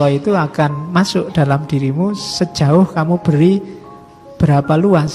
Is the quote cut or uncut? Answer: uncut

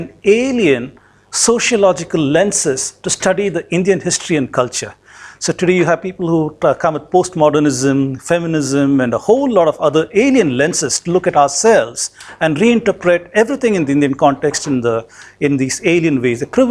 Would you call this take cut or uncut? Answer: uncut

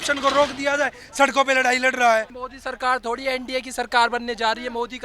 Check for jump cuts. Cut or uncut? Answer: cut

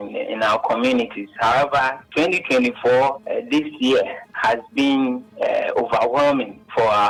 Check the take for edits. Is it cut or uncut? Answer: uncut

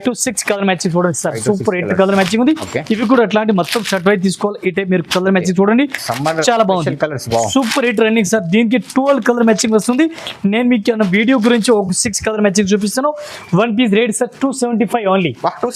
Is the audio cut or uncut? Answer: uncut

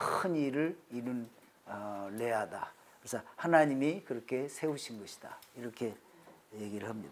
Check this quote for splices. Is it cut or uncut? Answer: uncut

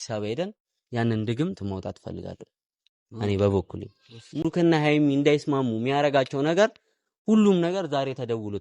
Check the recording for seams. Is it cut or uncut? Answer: cut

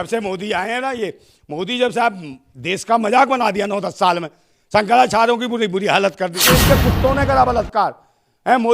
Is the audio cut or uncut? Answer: cut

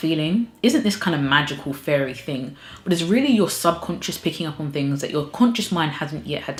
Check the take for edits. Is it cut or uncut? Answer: uncut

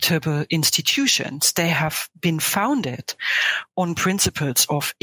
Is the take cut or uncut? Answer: uncut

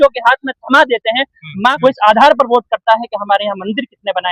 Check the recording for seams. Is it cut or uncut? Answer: cut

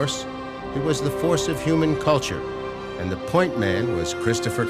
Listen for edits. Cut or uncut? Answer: cut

